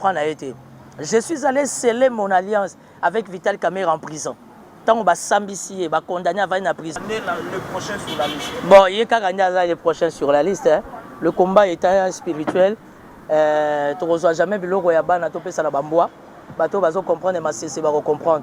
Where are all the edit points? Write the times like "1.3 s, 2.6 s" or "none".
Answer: 7.0 s